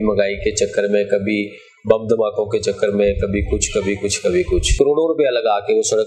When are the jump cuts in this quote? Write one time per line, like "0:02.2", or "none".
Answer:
0:04.7